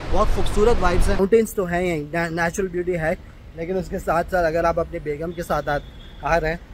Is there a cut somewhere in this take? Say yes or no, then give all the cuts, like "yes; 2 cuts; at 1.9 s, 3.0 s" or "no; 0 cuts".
yes; 1 cut; at 1.2 s